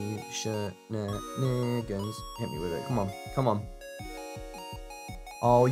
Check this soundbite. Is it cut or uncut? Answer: uncut